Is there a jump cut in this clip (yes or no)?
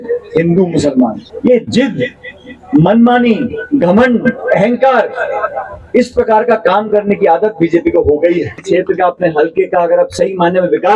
yes